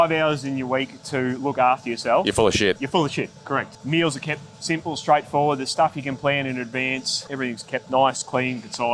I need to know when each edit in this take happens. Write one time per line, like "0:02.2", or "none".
0:03.8
0:07.3